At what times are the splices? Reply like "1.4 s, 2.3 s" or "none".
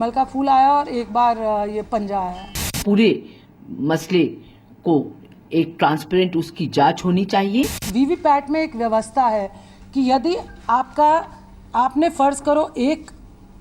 7.8 s

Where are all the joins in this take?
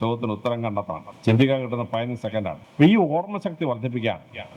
1.1 s, 2.6 s

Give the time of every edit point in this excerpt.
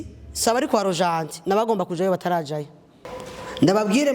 3.0 s

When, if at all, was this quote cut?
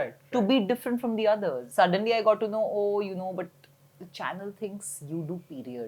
1.6 s

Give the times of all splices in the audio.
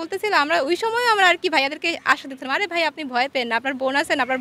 none

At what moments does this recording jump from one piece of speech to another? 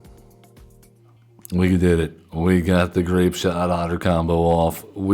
0.9 s

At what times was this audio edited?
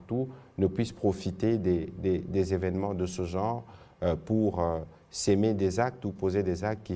none

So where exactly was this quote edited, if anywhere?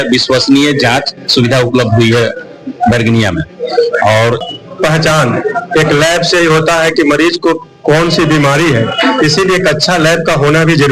4.4 s

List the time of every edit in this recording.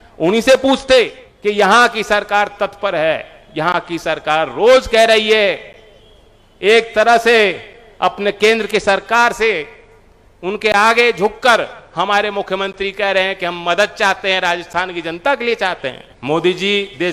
1.2 s, 16.1 s

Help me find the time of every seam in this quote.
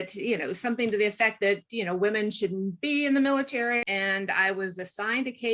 3.8 s

